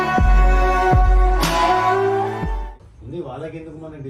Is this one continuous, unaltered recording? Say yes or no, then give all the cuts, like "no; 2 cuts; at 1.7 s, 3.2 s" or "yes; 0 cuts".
yes; 0 cuts